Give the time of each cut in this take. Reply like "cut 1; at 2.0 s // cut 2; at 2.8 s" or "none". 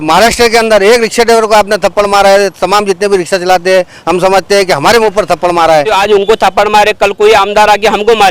cut 1; at 5.9 s